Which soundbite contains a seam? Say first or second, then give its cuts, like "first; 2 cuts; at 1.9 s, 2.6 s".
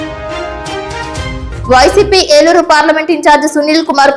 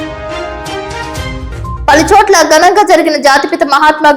second; 1 cut; at 1.5 s